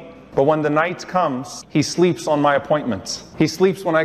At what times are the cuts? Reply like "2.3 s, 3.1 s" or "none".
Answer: 1.5 s